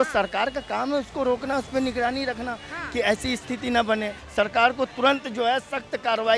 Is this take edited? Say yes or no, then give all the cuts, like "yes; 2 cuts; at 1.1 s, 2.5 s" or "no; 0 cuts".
yes; 1 cut; at 4.2 s